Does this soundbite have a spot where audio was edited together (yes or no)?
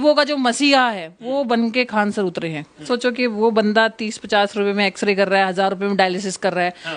yes